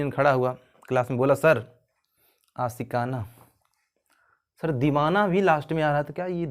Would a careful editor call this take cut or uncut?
uncut